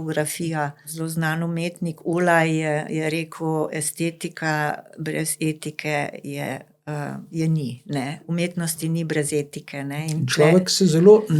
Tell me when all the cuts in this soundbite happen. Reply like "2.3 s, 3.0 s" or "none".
0.9 s, 8.2 s

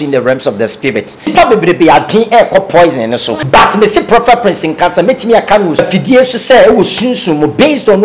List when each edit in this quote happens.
1.3 s, 3.3 s, 5.8 s

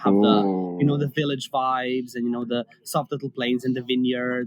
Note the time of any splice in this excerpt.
none

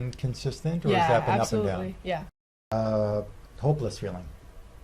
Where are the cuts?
2.6 s

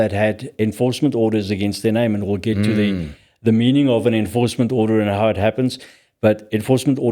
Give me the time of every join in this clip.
none

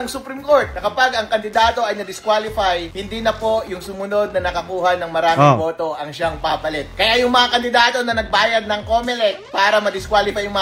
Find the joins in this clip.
none

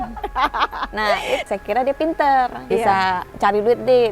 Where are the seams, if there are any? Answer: 1.4 s, 3.1 s

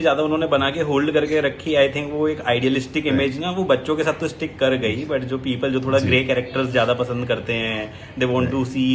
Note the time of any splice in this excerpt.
none

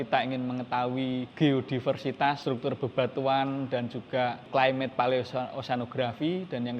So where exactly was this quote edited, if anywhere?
1.3 s, 2.4 s, 4.4 s

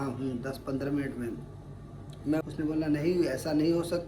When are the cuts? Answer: 2.4 s

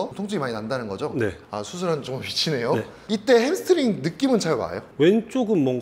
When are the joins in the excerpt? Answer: 1.4 s, 4.8 s

